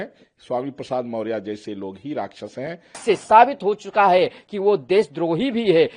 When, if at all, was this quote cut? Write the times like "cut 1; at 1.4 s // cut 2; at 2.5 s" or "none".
cut 1; at 2.9 s